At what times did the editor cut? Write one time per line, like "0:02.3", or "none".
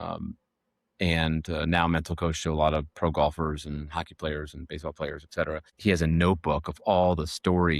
0:05.6

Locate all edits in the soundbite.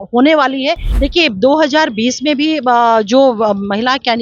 0:00.9

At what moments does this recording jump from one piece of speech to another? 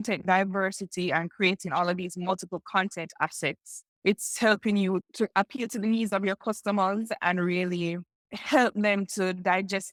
none

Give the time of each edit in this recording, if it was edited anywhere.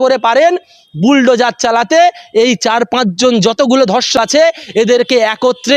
none

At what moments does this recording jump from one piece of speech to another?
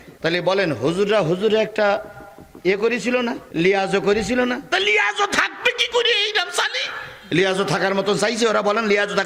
none

